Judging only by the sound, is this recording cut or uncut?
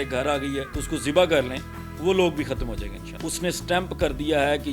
cut